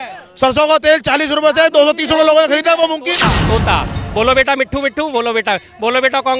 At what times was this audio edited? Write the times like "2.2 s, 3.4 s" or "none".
3.2 s